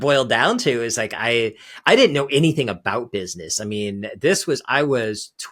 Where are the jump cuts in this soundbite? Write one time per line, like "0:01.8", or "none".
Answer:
none